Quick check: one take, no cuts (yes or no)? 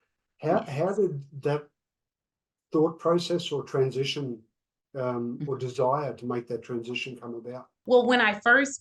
no